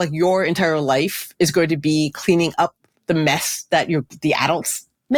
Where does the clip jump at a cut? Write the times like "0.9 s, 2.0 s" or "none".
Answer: none